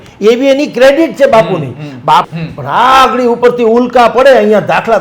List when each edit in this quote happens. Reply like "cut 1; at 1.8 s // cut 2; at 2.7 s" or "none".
cut 1; at 2.3 s